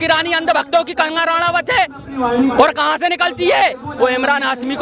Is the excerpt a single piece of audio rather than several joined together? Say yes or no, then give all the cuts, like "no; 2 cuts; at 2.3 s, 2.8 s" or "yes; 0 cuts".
yes; 0 cuts